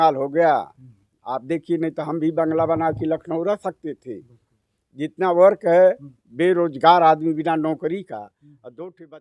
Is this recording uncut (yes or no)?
yes